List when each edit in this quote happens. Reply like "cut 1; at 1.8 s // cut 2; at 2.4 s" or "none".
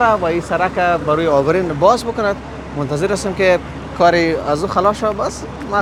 none